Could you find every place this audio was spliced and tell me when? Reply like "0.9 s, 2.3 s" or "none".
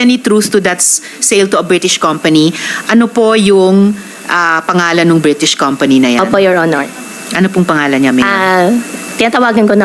none